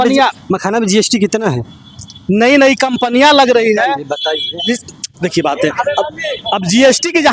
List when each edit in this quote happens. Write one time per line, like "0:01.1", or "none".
none

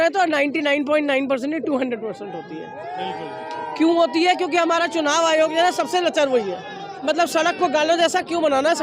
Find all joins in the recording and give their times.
0:07.0

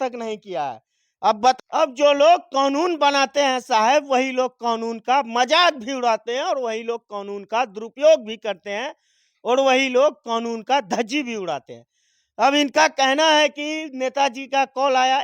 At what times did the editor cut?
0:01.6

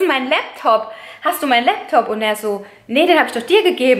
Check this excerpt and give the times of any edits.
none

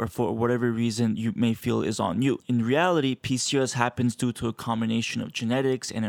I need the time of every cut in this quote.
0:02.4

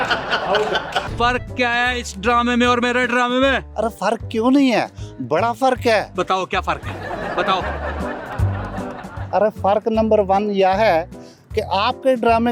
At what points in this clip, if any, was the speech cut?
0:01.1

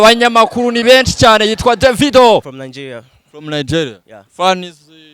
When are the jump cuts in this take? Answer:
0:02.6

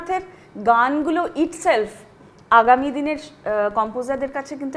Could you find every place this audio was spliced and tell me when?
none

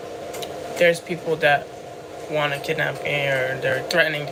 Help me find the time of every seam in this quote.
none

